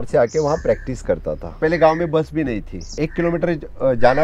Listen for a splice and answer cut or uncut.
cut